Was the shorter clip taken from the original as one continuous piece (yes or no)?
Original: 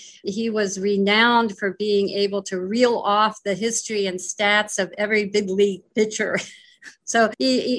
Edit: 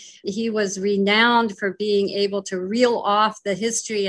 yes